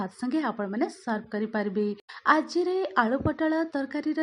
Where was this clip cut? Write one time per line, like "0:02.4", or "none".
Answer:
0:02.1